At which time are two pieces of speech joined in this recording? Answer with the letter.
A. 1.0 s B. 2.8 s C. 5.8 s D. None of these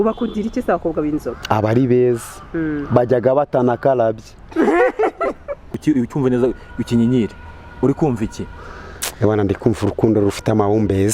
C